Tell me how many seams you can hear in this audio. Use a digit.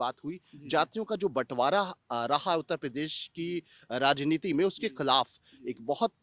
0